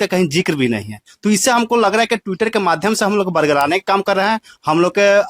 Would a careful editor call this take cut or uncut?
uncut